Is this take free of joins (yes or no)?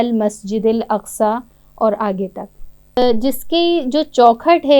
no